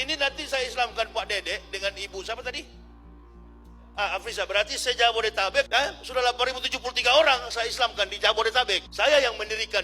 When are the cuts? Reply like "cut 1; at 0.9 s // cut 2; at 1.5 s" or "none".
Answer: cut 1; at 5.7 s // cut 2; at 8.9 s